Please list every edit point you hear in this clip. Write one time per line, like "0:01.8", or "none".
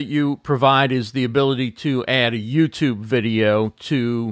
none